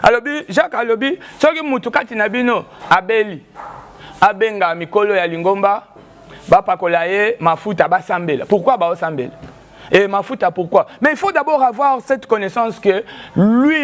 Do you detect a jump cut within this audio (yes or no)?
no